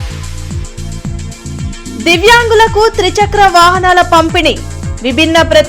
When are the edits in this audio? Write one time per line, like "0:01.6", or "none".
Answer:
0:00.9
0:01.8